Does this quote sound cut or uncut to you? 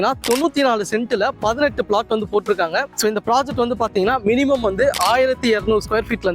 cut